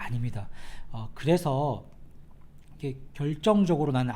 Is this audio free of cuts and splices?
no; 1 cut; at 2.7 s

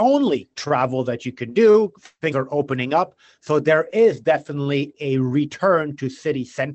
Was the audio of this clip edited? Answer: no; 0 cuts

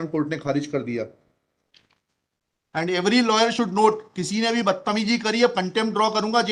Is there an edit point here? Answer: yes; 1 cut; at 1.8 s

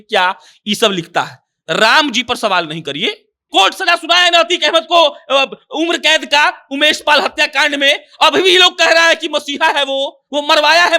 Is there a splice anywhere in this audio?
yes; 1 cut; at 3.3 s

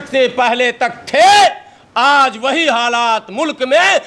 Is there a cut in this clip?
no; 0 cuts

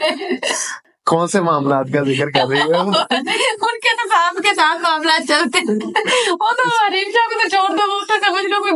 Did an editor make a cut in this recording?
no; 0 cuts

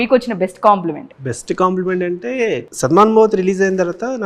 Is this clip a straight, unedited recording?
no; 2 cuts; at 1.1 s, 2.7 s

